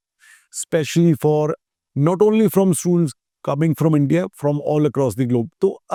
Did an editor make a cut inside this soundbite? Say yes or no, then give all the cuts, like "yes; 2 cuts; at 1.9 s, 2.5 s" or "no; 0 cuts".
no; 0 cuts